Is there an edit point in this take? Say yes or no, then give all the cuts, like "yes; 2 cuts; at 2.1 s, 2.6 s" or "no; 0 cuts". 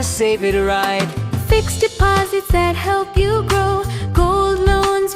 no; 0 cuts